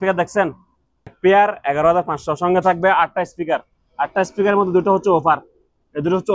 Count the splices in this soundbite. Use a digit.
1